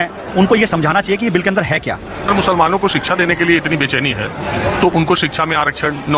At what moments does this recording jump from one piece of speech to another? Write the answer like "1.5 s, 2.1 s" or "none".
2.3 s